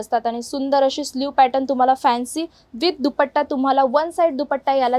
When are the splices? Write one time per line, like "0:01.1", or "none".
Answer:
none

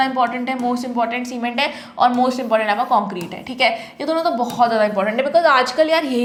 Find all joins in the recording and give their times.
none

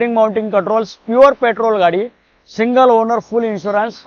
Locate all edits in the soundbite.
none

